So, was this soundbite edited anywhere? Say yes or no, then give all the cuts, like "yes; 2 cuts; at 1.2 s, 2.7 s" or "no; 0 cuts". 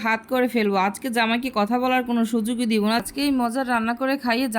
yes; 1 cut; at 3.0 s